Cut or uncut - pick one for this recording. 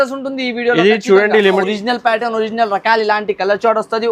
cut